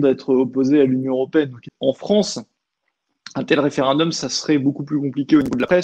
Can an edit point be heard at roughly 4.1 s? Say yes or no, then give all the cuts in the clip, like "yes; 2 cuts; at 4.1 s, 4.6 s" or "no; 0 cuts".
no; 1 cut; at 1.7 s